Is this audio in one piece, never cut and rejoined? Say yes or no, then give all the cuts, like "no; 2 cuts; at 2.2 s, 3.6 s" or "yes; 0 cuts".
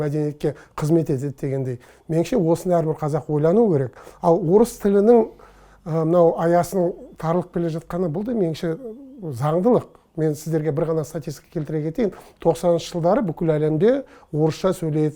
yes; 0 cuts